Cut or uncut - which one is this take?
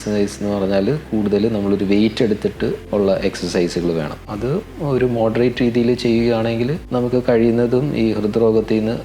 cut